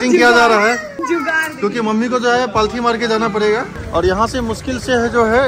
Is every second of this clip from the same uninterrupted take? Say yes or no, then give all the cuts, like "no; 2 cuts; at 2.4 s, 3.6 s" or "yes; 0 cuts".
no; 2 cuts; at 0.9 s, 3.8 s